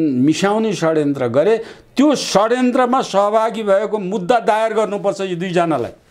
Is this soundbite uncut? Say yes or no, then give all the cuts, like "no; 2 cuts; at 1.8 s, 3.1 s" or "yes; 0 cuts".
yes; 0 cuts